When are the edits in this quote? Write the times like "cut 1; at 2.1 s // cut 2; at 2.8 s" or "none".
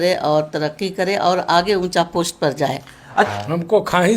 cut 1; at 3.3 s